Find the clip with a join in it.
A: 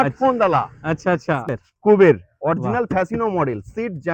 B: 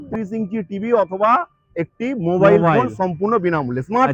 A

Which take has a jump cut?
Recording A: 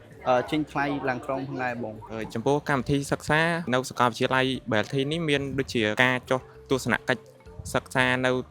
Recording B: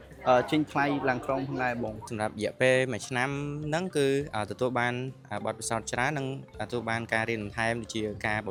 A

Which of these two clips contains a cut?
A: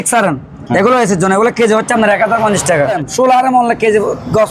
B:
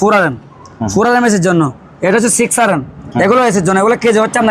A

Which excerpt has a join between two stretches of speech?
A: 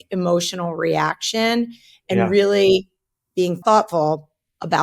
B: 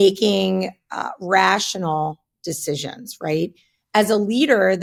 A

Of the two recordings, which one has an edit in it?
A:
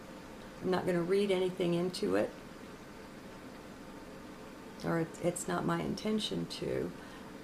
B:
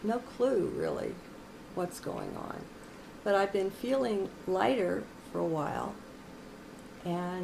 B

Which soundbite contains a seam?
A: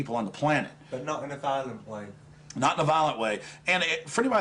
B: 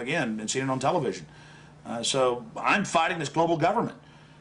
A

